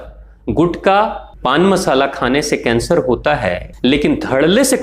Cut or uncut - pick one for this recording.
cut